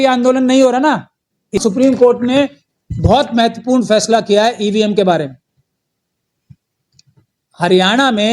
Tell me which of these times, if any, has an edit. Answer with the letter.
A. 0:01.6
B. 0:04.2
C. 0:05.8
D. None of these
A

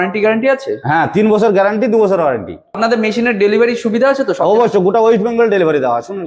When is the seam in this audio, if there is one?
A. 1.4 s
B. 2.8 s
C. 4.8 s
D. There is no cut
B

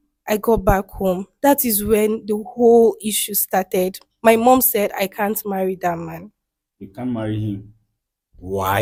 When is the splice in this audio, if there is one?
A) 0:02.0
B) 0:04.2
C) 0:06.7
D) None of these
D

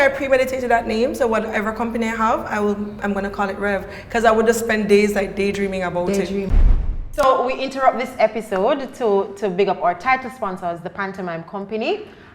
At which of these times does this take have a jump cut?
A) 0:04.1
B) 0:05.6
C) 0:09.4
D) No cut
D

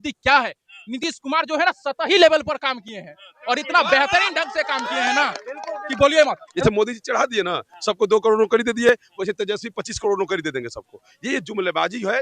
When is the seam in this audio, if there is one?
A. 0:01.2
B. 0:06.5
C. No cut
B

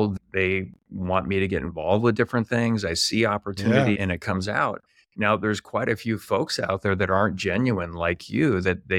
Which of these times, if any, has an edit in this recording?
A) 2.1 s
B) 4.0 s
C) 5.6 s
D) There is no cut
B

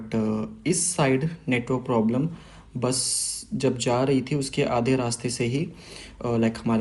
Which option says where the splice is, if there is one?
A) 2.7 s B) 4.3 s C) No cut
C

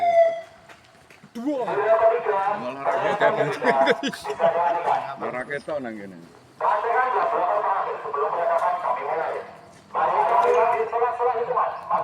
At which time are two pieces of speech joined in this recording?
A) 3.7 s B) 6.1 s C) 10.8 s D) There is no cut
C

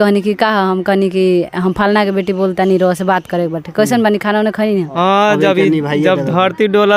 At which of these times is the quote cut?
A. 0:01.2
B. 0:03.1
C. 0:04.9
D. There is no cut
C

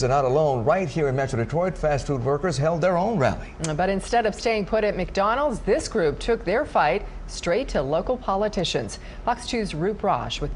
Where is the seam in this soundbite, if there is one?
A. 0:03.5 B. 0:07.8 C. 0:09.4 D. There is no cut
C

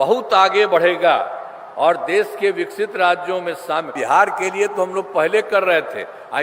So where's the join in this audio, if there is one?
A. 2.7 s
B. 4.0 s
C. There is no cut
B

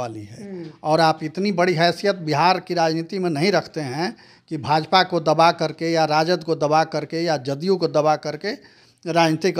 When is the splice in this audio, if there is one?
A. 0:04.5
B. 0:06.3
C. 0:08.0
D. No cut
D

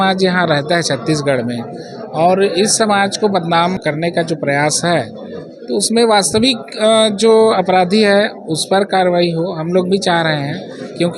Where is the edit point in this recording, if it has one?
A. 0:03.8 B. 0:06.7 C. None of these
A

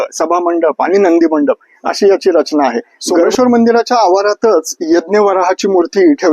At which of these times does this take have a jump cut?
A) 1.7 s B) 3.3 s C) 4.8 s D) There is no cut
B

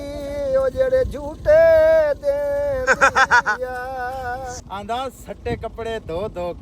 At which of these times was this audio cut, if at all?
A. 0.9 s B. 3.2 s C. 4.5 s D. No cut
C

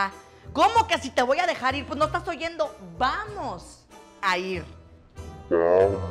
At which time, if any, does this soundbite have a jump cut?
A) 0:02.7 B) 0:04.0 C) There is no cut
C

